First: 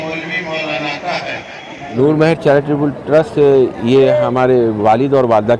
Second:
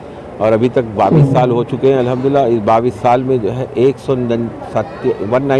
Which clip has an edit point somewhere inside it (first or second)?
first